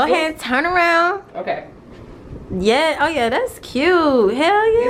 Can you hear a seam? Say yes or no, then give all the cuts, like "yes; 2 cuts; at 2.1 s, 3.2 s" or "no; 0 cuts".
no; 0 cuts